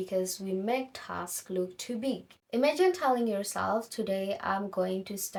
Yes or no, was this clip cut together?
no